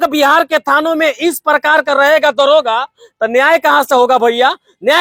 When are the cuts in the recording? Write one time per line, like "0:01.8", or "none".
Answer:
none